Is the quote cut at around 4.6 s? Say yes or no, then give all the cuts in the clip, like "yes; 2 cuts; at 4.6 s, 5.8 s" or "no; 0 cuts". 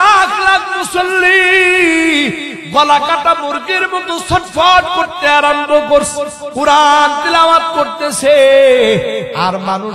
no; 1 cut; at 6.4 s